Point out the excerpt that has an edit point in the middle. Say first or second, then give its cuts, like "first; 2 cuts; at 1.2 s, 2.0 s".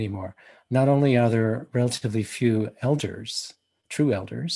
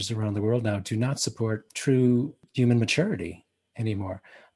second; 2 cuts; at 1.7 s, 2.4 s